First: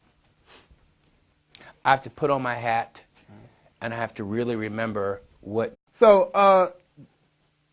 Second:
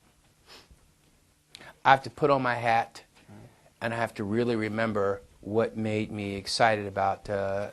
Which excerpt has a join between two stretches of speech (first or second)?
second